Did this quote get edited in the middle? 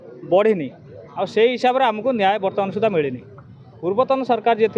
no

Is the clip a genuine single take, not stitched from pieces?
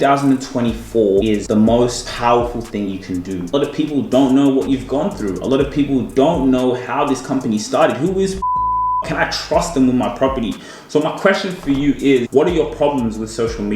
no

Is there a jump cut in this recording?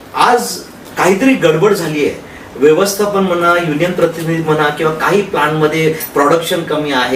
no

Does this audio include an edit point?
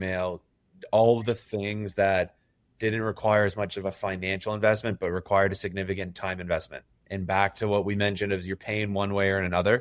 no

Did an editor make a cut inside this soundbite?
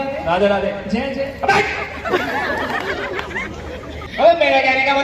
yes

